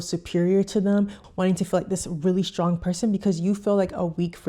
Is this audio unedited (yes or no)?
no